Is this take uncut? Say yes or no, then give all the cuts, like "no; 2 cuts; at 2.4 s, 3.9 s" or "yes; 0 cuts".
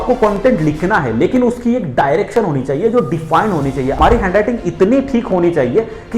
no; 1 cut; at 4.0 s